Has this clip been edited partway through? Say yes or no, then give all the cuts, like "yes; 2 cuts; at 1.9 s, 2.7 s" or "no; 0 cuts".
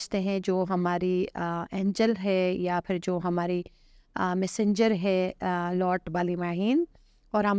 no; 0 cuts